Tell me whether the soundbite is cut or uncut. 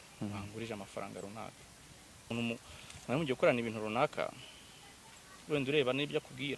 cut